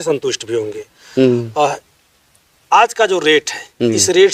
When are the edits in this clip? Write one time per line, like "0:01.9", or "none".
none